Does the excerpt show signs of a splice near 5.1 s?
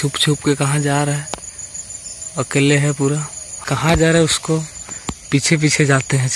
no; 1 cut; at 3.6 s

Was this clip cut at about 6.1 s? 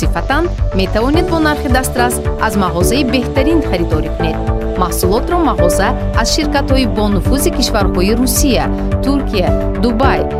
no; 0 cuts

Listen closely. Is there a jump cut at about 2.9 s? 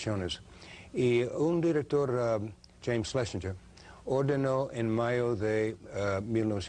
yes; 1 cut; at 2.9 s

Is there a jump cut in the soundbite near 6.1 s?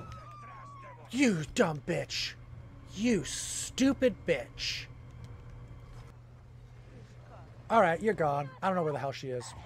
yes; 1 cut; at 6.1 s

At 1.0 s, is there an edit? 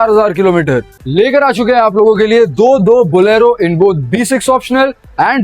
yes; 1 cut; at 1.0 s

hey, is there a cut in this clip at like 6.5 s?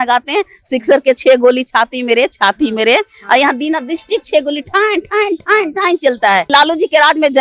yes; 1 cut; at 6.5 s

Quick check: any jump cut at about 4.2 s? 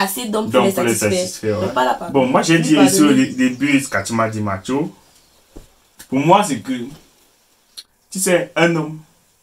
no; 1 cut; at 1.9 s

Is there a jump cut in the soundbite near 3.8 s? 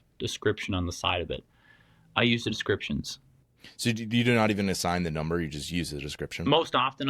yes; 1 cut; at 3.8 s

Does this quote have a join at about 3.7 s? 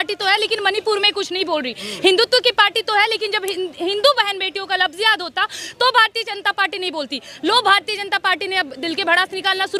no; 0 cuts

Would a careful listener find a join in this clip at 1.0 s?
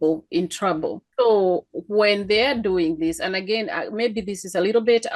yes; 1 cut; at 1.0 s

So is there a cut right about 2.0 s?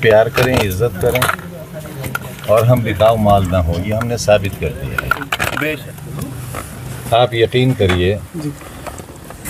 no; 1 cut; at 5.8 s

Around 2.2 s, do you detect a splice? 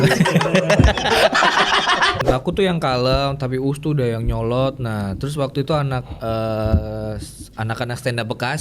yes; 1 cut; at 2.2 s

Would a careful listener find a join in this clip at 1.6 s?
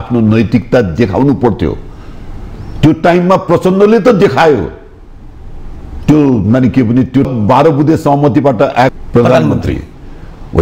no; 2 cuts; at 7.3 s, 8.9 s

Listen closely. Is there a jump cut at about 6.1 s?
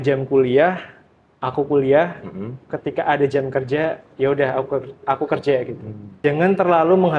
yes; 1 cut; at 6.1 s

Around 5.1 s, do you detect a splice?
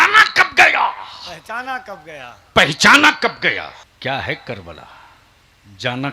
no; 1 cut; at 3.8 s

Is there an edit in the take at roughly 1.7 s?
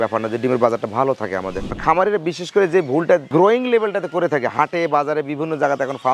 yes; 1 cut; at 1.7 s

